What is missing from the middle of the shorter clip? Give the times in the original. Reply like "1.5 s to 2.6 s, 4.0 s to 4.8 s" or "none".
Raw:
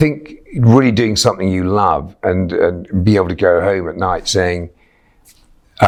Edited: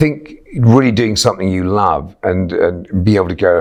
none

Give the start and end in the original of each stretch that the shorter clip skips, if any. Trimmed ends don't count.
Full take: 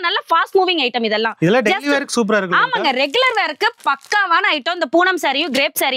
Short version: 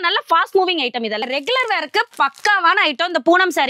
1.2 s to 2.9 s

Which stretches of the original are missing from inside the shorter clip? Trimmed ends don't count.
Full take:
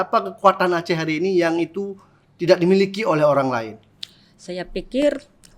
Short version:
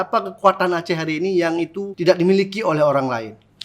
1.9 s to 2.3 s

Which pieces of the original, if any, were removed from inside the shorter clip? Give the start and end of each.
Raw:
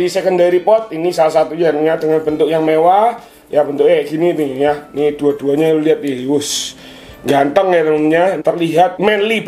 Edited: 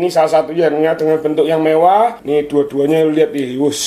3.2 s to 4.9 s

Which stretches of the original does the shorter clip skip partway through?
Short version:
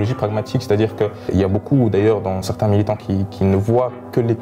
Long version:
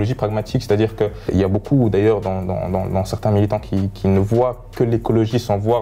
2.5 s to 3.1 s

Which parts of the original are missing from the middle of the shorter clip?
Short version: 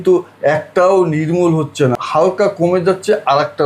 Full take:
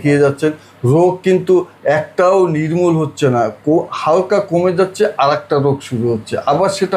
3.4 s to 3.9 s

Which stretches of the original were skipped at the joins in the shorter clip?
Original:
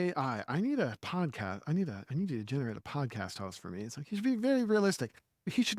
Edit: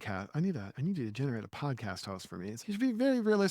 3.9 s to 4.0 s

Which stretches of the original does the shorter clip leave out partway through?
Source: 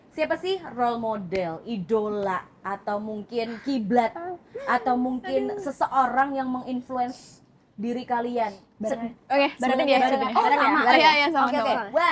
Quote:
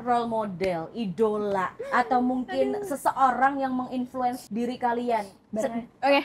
2.5 s to 4.5 s, 7.2 s to 7.7 s

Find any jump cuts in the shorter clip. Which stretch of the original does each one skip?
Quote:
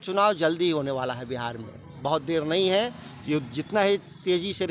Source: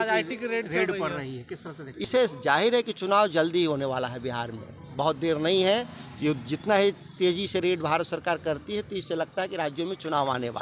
none

